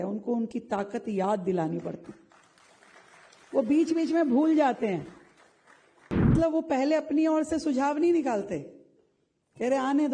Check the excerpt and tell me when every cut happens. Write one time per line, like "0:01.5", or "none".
0:06.3

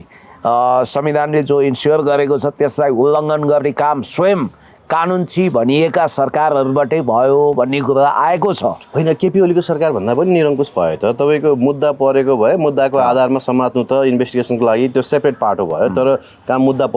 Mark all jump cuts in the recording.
none

